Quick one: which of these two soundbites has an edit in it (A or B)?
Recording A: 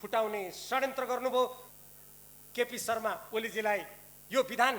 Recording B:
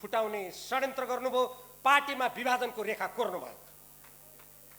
A